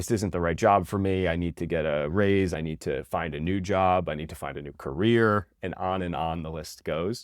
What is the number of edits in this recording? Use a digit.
1